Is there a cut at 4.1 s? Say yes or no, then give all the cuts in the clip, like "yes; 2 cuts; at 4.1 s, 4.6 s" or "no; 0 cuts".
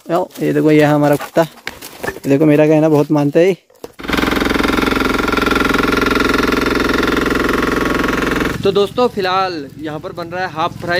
yes; 2 cuts; at 4.1 s, 8.5 s